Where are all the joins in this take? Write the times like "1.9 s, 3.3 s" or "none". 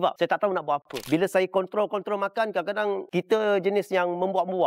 0.9 s